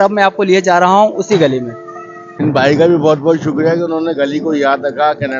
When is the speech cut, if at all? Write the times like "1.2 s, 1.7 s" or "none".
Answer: 2.4 s